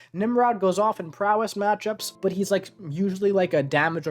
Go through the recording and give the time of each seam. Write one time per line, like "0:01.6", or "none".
0:02.1